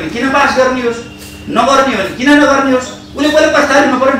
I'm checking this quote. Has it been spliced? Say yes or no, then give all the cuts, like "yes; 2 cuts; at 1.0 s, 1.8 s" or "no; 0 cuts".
no; 0 cuts